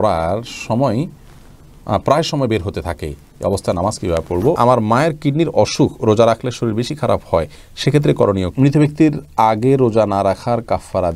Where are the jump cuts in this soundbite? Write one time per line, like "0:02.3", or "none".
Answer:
0:04.6
0:08.5